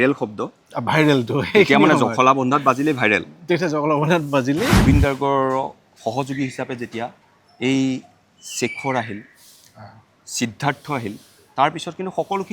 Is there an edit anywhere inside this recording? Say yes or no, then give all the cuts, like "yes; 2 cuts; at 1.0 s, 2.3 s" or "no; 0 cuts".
yes; 1 cut; at 4.8 s